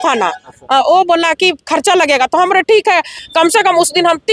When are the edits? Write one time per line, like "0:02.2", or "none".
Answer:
0:03.2